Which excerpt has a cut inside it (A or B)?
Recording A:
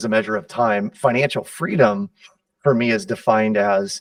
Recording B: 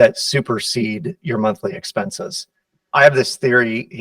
B